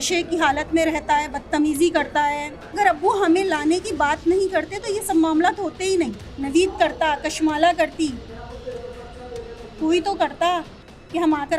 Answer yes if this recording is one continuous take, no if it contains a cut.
no